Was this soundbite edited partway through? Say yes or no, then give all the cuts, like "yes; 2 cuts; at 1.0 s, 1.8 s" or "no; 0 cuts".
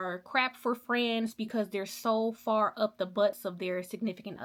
no; 0 cuts